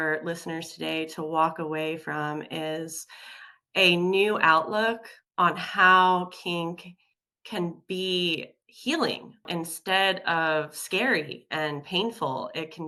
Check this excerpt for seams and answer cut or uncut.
uncut